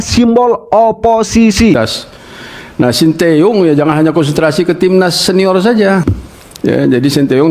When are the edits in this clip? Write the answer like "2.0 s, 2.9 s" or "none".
1.8 s, 6.1 s